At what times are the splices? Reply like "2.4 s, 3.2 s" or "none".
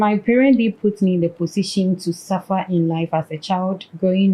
none

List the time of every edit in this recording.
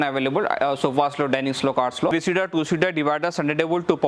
2.1 s

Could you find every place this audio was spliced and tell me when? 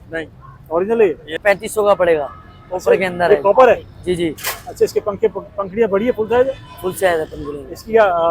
1.3 s

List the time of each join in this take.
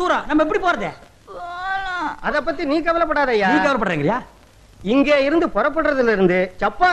4.1 s

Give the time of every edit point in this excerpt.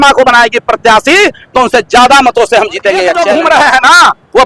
3.2 s

